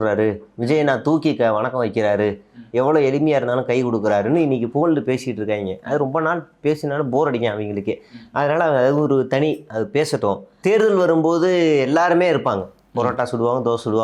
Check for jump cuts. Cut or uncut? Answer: cut